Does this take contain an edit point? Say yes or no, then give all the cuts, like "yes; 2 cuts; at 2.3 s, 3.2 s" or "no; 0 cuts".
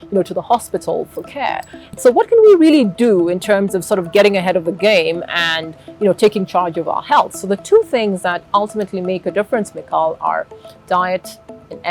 yes; 1 cut; at 2.0 s